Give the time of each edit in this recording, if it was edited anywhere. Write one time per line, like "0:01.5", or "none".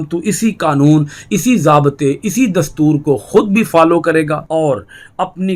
0:04.4